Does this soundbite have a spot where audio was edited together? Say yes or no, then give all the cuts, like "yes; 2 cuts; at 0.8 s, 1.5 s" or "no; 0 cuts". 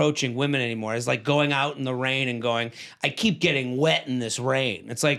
no; 0 cuts